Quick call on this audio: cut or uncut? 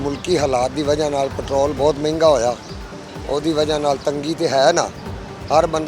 uncut